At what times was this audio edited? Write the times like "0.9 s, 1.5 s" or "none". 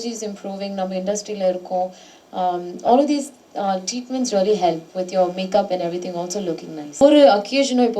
7.0 s